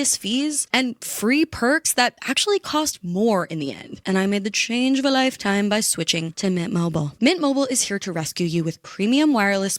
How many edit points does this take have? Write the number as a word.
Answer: one